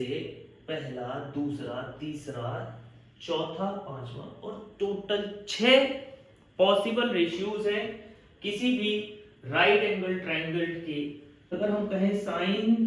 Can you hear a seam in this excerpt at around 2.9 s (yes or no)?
no